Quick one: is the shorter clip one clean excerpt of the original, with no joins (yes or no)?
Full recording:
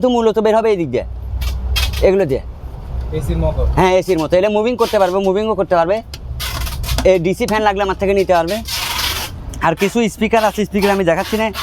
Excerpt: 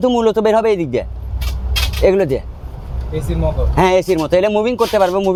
yes